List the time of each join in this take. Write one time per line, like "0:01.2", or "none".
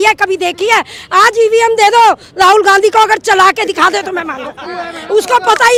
none